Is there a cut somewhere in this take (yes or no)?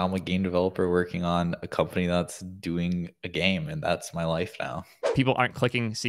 yes